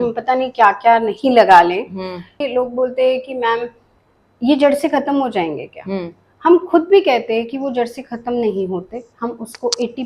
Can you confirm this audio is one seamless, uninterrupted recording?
no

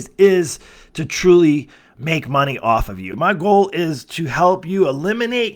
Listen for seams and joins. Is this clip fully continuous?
no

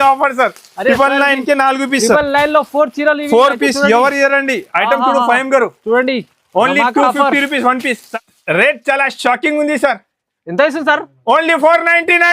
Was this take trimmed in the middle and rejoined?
yes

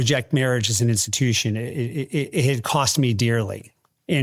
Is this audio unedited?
yes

